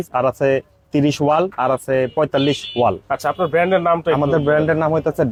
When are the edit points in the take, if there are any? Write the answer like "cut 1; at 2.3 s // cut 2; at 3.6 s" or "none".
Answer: none